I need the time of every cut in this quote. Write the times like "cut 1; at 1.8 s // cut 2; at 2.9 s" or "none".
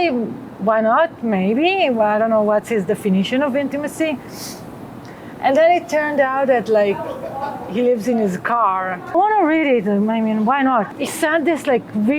cut 1; at 9.1 s // cut 2; at 10.9 s

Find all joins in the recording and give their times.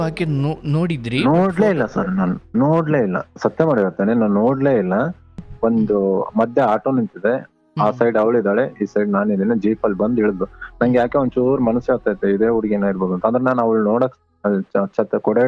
cut 1; at 5.5 s

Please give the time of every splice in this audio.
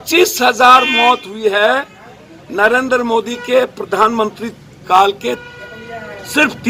none

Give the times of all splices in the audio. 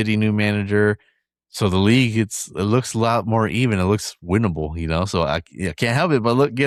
none

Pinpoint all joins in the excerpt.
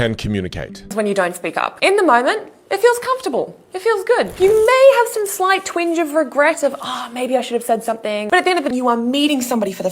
cut 1; at 0.9 s // cut 2; at 8.7 s

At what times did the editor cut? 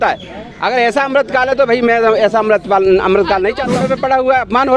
cut 1; at 3.8 s

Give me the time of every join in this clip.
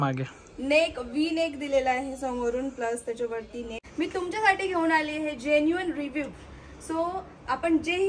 cut 1; at 3.8 s

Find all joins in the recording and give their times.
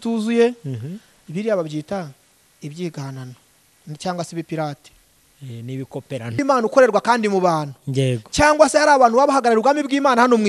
cut 1; at 6.4 s

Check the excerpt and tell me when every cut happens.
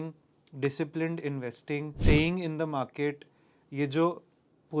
cut 1; at 1.9 s

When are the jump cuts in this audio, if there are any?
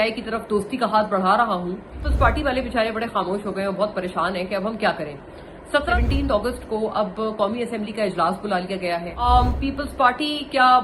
cut 1; at 2.0 s // cut 2; at 5.9 s // cut 3; at 9.2 s

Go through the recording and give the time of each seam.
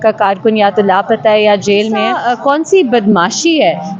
cut 1; at 2.1 s

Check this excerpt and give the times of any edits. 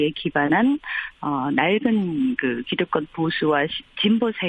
cut 1; at 2.4 s

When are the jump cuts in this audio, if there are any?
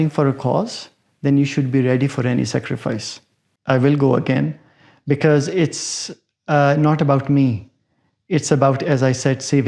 cut 1; at 3.7 s

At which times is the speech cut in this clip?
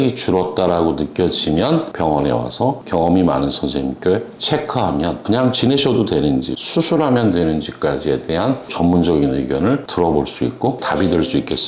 cut 1; at 1.9 s // cut 2; at 6.5 s // cut 3; at 8.7 s

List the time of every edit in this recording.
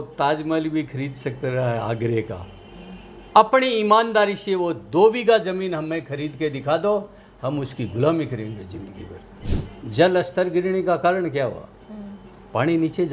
cut 1; at 9.4 s

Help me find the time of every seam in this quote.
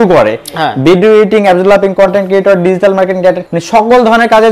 cut 1; at 3.5 s

